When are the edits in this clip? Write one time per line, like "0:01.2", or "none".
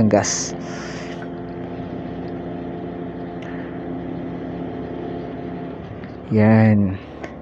none